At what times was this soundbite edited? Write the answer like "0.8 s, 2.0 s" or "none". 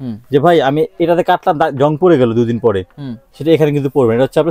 none

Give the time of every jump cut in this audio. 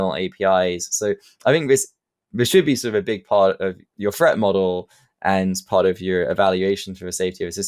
3.9 s

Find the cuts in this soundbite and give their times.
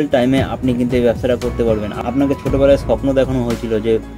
1.9 s

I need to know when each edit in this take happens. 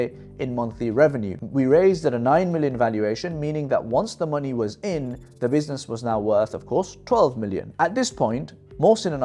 1.3 s

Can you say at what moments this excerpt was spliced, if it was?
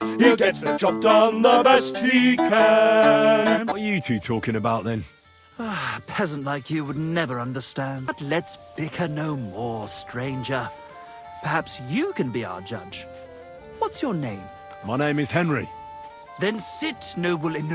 3.7 s, 8.1 s

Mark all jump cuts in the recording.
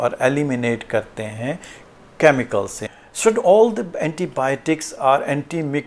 2.8 s

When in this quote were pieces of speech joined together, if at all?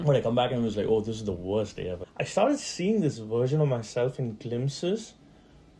2.0 s

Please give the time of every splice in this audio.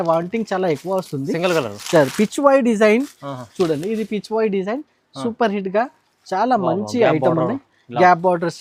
none

